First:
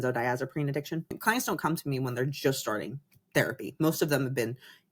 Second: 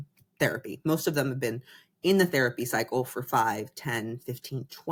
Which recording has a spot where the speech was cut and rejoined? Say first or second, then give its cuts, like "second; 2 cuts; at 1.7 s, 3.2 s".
first; 1 cut; at 1.2 s